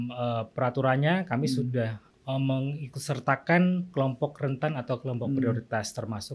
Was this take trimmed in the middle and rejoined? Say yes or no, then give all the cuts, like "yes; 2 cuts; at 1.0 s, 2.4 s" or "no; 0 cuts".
yes; 1 cut; at 2.1 s